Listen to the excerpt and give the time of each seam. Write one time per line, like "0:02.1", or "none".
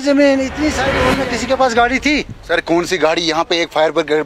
0:00.9